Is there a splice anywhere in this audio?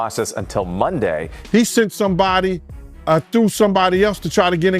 yes; 1 cut; at 1.4 s

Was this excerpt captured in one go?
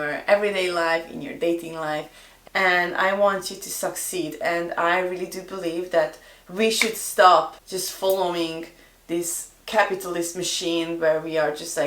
no; 1 cut; at 2.2 s

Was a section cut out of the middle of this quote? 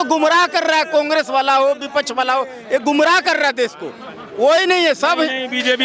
no; 0 cuts

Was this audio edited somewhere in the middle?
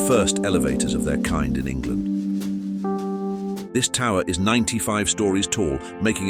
yes; 1 cut; at 3.6 s

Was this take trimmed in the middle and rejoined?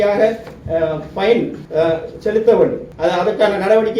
yes; 2 cuts; at 1.6 s, 2.9 s

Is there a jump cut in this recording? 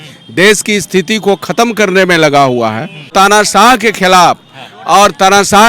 yes; 1 cut; at 3.1 s

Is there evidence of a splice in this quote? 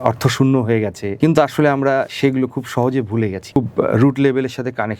yes; 3 cuts; at 1.0 s, 2.1 s, 3.6 s

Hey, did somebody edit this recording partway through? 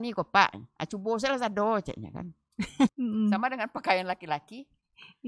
yes; 1 cut; at 2.9 s

